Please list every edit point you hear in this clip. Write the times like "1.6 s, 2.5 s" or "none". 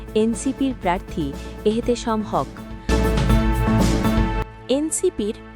2.8 s, 4.5 s

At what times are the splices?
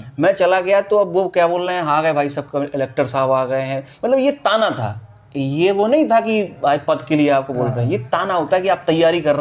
none

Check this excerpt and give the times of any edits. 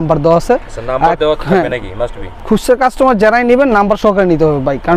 none

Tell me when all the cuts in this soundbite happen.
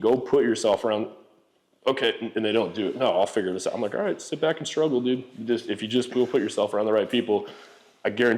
none

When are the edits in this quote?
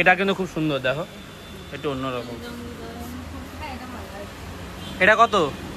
none

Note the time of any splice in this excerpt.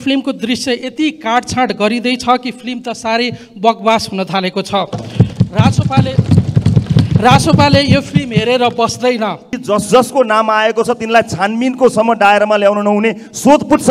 9.5 s

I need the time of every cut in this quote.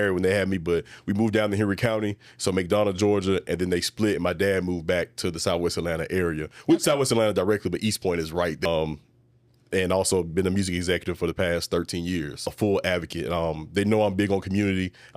8.7 s, 12.5 s

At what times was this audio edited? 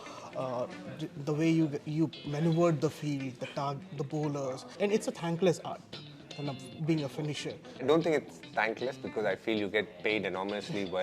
4.7 s, 7.8 s

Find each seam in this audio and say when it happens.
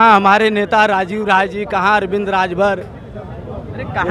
none

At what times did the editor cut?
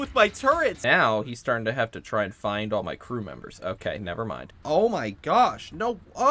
0.8 s, 4.5 s

